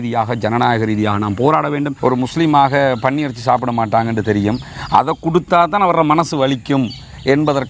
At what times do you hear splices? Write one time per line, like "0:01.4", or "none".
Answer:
0:01.9

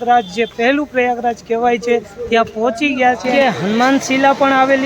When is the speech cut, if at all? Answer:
0:03.3

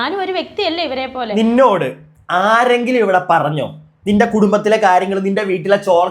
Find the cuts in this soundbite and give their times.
0:01.3

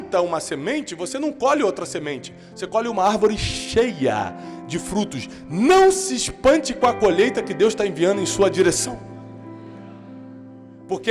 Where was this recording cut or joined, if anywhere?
none

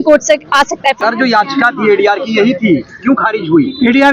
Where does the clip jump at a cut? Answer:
0:01.0

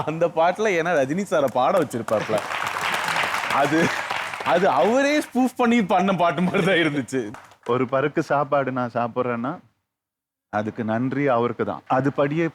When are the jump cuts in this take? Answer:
0:07.3

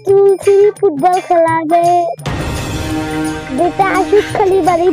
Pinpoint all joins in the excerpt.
none

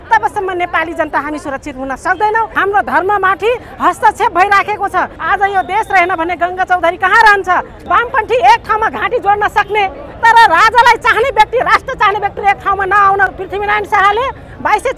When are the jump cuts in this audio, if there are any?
0:02.5
0:05.2
0:07.7
0:13.4

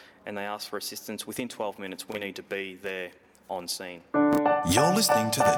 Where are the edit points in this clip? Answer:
0:04.0

